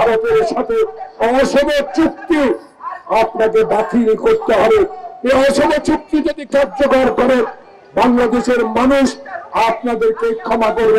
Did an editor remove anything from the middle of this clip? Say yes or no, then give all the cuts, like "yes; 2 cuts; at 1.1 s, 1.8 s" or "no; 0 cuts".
no; 0 cuts